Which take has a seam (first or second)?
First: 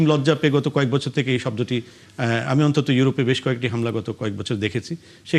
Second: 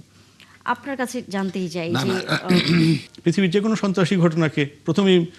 second